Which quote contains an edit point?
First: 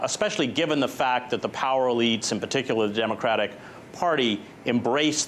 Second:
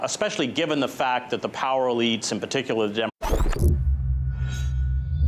first; 1 cut; at 3.1 s

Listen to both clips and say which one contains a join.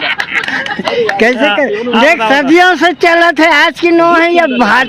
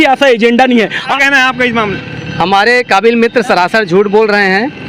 second; 1 cut; at 1.0 s

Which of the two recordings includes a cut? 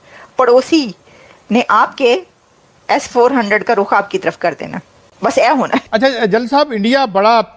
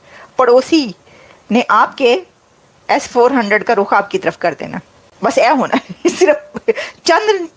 first; 1 cut; at 5.9 s

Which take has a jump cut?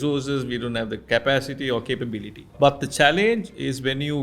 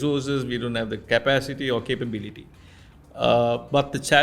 first; 1 cut; at 2.5 s

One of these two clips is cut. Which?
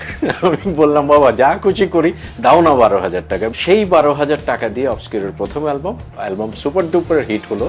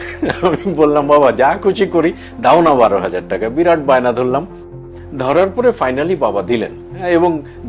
first; 2 cuts; at 3.5 s, 6.1 s

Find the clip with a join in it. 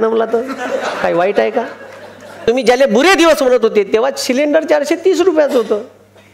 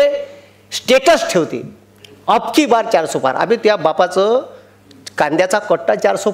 first; 1 cut; at 2.4 s

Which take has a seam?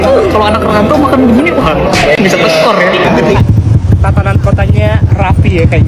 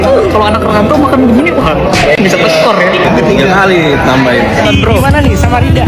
first; 1 cut; at 3.4 s

